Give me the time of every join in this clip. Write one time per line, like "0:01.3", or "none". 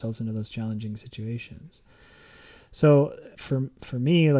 0:03.3